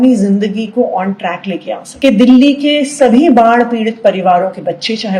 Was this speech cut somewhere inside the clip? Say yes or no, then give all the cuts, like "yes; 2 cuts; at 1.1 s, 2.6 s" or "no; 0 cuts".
yes; 1 cut; at 1.8 s